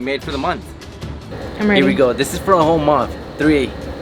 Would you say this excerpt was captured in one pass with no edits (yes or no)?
no